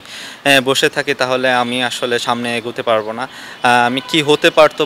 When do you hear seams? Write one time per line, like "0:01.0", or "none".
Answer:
none